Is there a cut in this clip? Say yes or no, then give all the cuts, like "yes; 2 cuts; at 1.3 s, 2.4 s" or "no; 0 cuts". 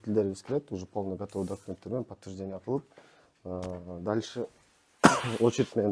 no; 0 cuts